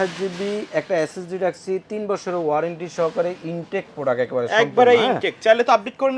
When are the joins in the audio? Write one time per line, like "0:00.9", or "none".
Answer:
none